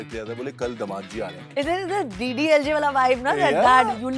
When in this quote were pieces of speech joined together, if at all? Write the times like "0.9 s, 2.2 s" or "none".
1.4 s